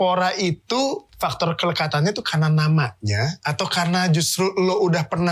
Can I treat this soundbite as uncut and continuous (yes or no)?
no